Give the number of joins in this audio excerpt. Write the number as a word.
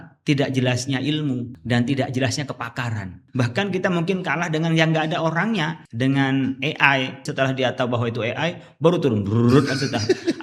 four